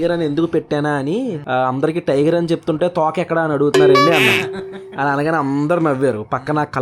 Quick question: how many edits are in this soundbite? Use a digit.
0